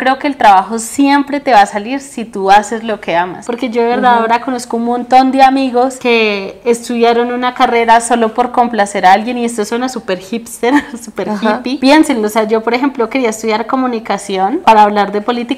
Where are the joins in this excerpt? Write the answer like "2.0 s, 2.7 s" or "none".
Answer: none